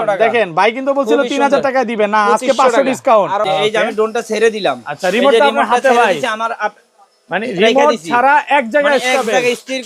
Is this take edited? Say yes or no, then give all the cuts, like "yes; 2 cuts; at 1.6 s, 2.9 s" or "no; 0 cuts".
yes; 1 cut; at 3.4 s